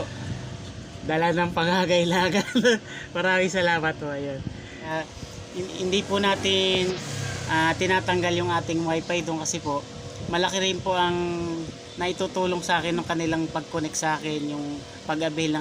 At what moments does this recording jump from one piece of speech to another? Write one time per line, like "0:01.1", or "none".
0:04.9